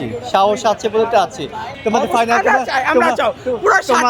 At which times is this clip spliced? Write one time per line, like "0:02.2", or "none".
0:01.6